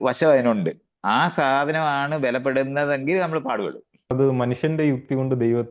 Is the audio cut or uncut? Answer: cut